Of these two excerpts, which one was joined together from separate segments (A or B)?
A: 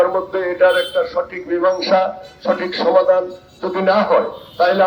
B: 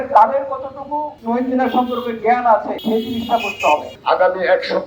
B